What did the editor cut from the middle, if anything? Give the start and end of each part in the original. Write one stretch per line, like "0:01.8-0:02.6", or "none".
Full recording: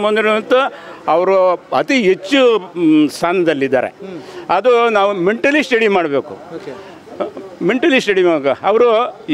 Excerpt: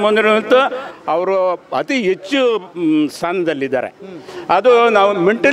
none